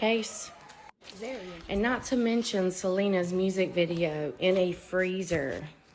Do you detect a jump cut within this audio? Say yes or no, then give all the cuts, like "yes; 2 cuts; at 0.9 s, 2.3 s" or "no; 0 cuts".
no; 0 cuts